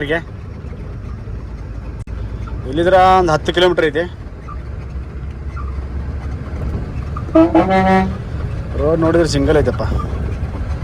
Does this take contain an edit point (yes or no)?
no